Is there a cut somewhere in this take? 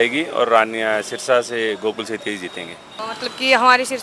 no; 0 cuts

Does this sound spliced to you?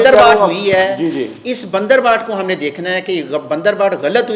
no; 0 cuts

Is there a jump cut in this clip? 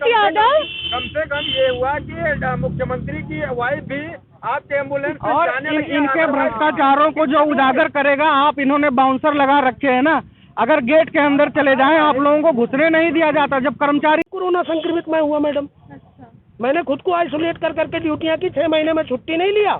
yes; 1 cut; at 14.3 s

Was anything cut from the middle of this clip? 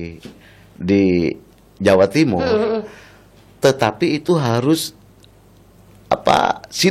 no; 0 cuts

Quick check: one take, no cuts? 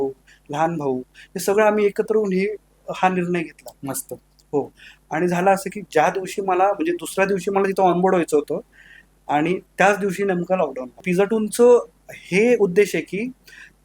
no; 1 cut; at 11.0 s

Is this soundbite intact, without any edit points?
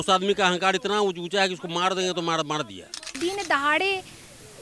no; 1 cut; at 3.1 s

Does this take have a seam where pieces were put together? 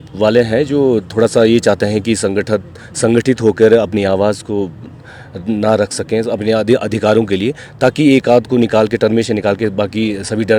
no; 0 cuts

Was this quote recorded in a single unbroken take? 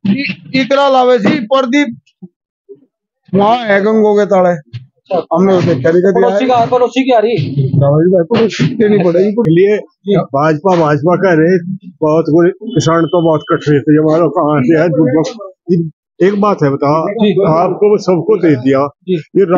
no; 1 cut; at 9.4 s

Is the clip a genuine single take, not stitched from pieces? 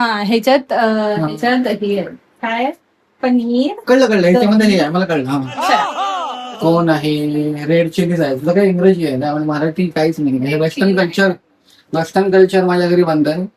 no; 1 cut; at 6.3 s

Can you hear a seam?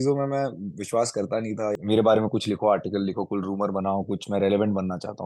yes; 1 cut; at 1.8 s

